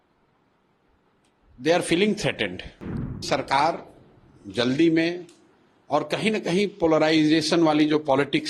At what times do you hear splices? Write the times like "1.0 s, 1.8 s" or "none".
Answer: 3.2 s

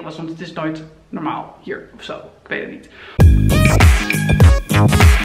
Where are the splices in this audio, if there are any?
3.0 s

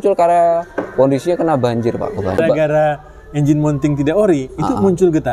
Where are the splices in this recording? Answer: 2.4 s

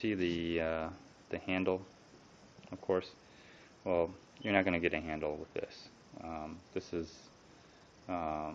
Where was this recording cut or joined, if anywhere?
none

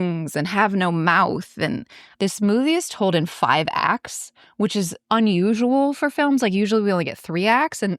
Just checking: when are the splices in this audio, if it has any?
2.0 s

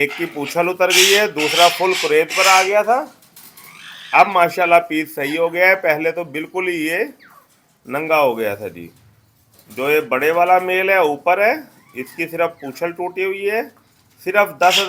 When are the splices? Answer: none

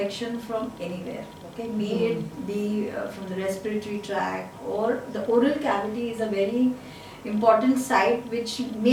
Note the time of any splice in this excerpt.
none

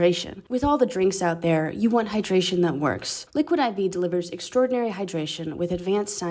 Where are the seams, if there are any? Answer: none

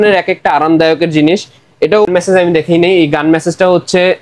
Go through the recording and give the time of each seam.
2.1 s

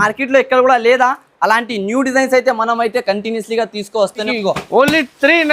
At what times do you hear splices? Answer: 4.3 s

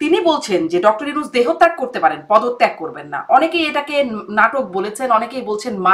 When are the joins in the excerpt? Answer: none

